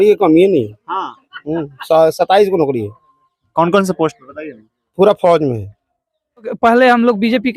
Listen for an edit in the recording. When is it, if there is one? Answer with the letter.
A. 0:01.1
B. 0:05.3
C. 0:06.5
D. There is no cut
C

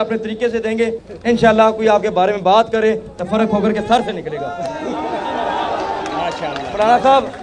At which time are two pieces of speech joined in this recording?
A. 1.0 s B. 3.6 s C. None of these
A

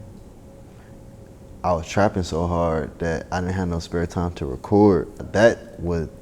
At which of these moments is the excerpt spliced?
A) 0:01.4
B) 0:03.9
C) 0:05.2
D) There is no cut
C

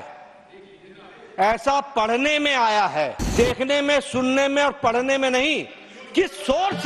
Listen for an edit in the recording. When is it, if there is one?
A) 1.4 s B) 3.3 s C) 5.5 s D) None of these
B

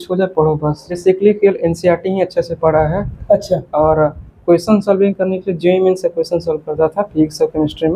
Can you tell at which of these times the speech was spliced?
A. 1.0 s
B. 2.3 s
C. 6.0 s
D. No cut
A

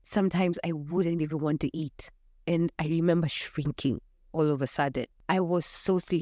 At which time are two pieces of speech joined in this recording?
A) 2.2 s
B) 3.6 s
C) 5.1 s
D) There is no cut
C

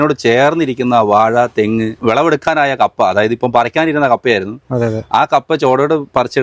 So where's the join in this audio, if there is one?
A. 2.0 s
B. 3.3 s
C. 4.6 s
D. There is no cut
A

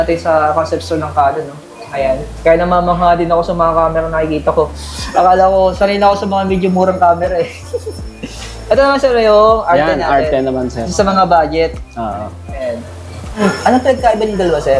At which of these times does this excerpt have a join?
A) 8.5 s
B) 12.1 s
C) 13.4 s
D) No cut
C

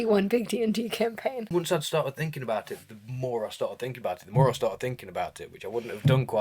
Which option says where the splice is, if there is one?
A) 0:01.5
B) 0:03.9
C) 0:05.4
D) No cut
A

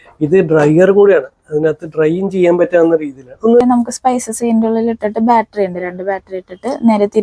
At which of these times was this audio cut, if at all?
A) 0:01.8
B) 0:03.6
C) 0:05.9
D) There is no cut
B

